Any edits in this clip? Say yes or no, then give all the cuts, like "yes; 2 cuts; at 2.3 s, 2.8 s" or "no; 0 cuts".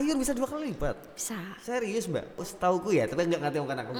no; 0 cuts